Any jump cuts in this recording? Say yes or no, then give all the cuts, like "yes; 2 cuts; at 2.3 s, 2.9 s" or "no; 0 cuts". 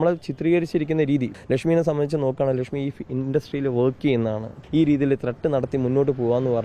yes; 2 cuts; at 1.3 s, 4.6 s